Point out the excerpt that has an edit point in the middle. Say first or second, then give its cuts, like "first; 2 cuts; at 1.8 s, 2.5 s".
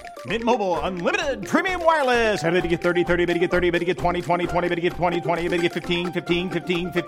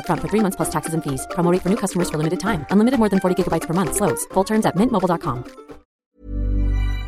second; 1 cut; at 5.9 s